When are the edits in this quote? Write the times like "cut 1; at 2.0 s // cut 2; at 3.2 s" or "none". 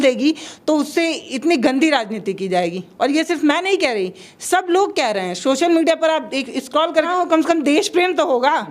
cut 1; at 7.1 s